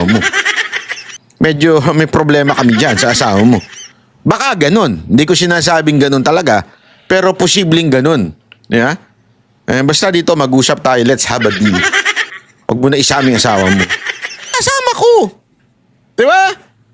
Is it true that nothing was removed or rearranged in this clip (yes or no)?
no